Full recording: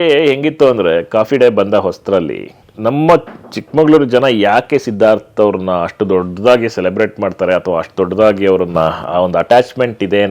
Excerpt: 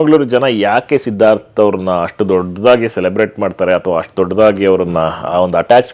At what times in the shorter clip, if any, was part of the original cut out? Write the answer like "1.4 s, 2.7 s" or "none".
none

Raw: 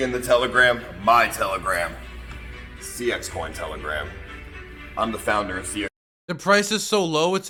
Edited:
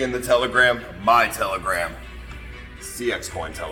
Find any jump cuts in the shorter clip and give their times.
none

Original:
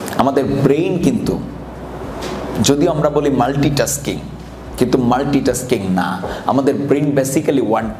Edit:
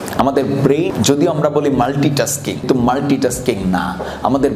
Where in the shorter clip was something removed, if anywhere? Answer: 0.9 s, 2.7 s

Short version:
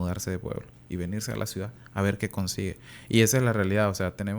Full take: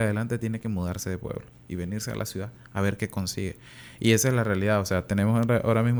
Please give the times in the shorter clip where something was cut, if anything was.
2.9 s

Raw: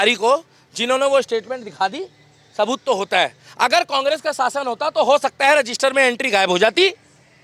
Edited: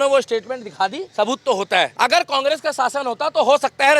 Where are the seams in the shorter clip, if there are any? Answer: 1.0 s, 1.9 s

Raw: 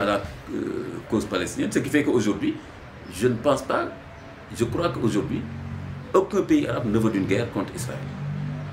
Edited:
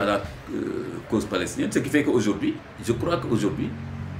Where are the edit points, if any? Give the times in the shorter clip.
2.7 s

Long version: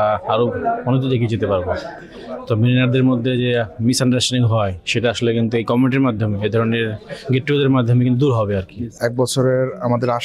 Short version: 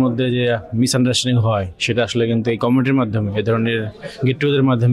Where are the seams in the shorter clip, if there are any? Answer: none

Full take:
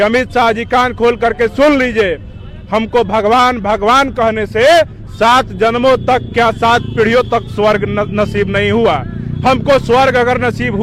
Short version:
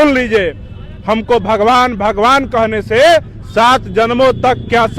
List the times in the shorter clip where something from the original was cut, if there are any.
none

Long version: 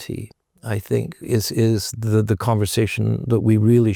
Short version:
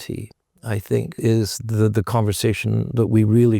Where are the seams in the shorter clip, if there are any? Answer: 1.2 s

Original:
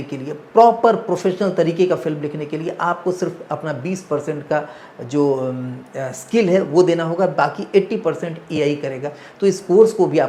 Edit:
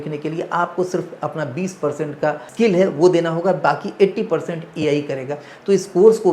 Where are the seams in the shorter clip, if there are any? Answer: 2.5 s

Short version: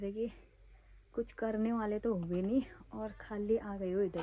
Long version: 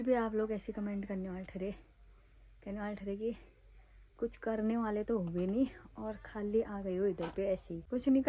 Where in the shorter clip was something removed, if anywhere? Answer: none

